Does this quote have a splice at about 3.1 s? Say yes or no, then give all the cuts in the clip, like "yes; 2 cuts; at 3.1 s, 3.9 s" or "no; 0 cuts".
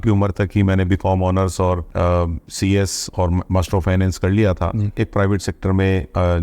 no; 2 cuts; at 1.9 s, 4.9 s